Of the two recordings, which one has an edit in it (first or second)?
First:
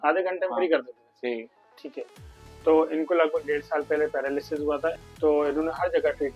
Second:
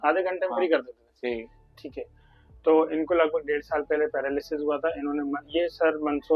first